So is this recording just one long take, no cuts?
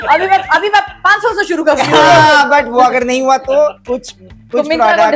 yes; 0 cuts

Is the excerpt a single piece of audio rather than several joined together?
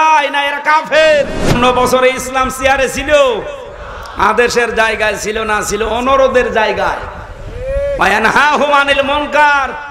no; 1 cut; at 1.5 s

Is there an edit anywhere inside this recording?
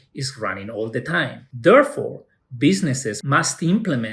yes; 2 cuts; at 1.4 s, 3.2 s

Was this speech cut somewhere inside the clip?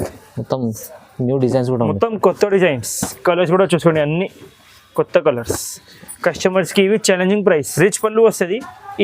yes; 1 cut; at 7.7 s

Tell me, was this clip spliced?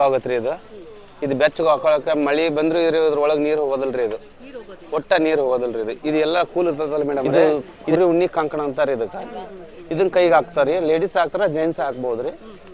yes; 1 cut; at 7.3 s

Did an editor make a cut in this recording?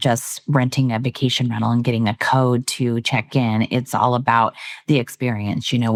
no; 0 cuts

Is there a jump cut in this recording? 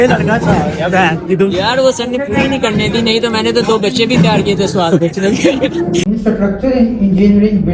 yes; 1 cut; at 6.0 s

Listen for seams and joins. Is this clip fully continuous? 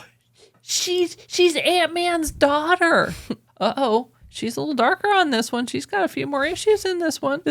no; 1 cut; at 3.4 s

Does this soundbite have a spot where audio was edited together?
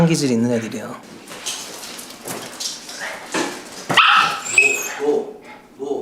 yes; 1 cut; at 1.0 s

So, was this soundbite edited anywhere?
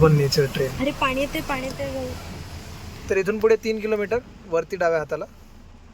no; 0 cuts

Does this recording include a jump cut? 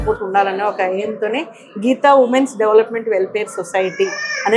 no; 0 cuts

